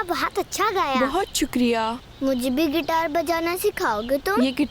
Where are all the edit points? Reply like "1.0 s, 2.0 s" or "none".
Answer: 1.0 s